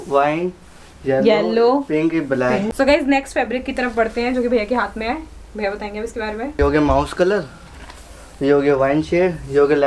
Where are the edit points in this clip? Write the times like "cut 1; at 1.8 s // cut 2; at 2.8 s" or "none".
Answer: cut 1; at 2.7 s // cut 2; at 6.6 s